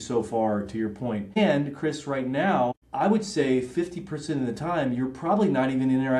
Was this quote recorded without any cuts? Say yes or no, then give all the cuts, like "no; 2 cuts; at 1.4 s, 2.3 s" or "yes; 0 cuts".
no; 2 cuts; at 1.4 s, 2.8 s